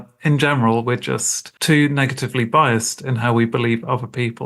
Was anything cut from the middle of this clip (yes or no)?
yes